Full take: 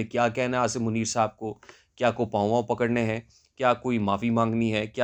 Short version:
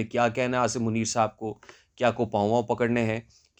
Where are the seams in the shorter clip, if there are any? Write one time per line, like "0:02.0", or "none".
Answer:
none